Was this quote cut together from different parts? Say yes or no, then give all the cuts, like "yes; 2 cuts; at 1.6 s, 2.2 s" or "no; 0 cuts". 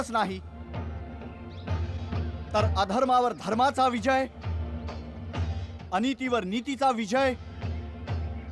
no; 0 cuts